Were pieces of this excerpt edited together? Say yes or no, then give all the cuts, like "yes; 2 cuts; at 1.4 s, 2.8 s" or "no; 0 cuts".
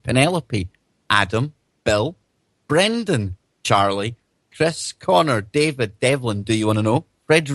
no; 0 cuts